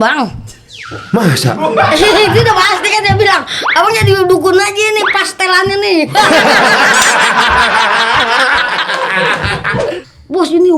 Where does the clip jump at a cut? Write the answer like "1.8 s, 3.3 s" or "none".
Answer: 9.8 s

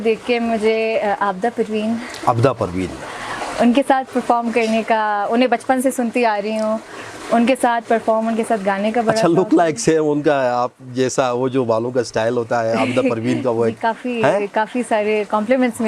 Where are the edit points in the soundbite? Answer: none

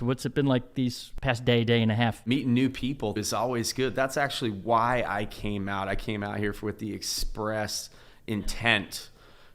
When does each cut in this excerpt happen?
1.1 s, 2.2 s, 3.2 s

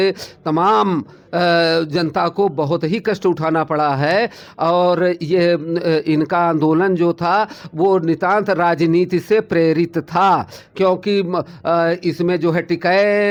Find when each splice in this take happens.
none

